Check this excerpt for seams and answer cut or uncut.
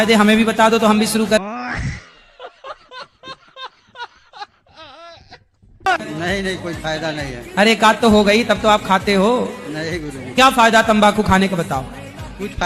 cut